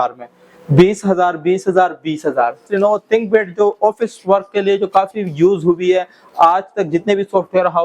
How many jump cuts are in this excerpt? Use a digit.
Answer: 1